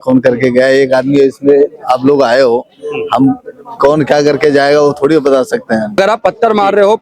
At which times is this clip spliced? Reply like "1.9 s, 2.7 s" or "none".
6.0 s